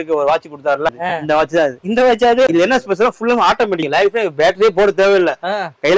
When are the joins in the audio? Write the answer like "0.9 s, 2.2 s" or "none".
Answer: 0.9 s, 2.5 s, 3.9 s